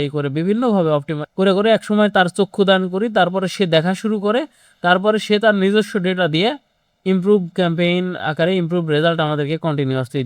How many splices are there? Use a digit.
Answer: 1